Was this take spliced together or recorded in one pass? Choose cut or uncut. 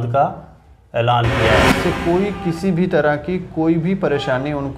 cut